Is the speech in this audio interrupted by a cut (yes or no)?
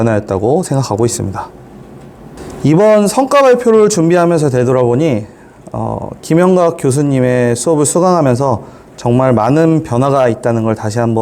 yes